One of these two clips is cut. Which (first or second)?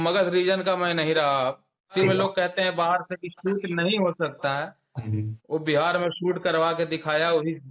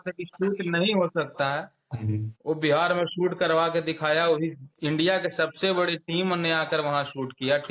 first